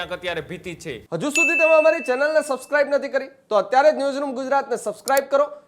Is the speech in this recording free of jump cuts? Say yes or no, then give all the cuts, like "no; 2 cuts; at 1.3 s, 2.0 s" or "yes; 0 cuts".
no; 1 cut; at 1.0 s